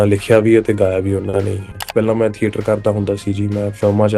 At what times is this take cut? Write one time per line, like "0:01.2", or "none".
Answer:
0:01.8